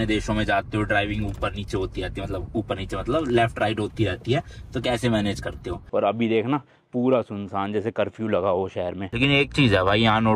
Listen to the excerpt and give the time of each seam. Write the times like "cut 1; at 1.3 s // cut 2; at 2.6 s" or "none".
cut 1; at 5.8 s // cut 2; at 9.1 s